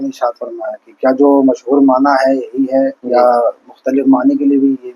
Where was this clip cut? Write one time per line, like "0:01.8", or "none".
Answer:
0:03.0